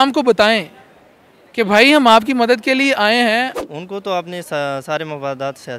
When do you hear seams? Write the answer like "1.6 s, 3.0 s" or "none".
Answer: 3.6 s